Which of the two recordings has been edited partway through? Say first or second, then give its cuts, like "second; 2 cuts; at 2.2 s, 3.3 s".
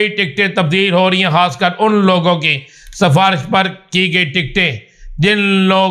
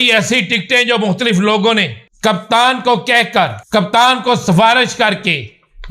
second; 2 cuts; at 2.0 s, 3.6 s